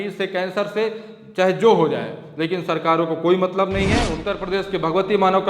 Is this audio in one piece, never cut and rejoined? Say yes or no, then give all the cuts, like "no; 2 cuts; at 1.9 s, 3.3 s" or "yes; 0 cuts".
no; 1 cut; at 4.1 s